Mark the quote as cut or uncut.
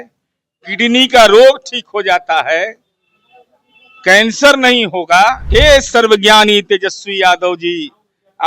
cut